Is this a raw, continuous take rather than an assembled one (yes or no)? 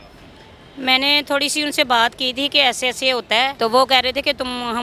no